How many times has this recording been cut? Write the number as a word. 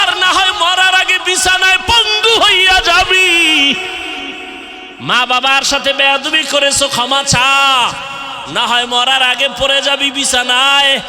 one